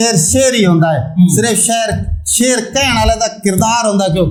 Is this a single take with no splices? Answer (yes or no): yes